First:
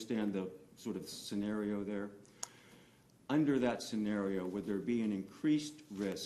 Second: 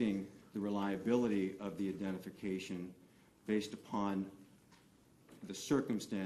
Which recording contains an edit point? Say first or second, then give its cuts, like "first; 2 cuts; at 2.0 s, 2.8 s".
first; 1 cut; at 2.2 s